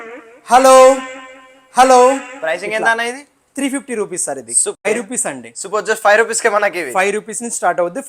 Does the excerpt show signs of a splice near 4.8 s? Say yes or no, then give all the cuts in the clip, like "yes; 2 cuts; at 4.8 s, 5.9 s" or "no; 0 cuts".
yes; 1 cut; at 4.8 s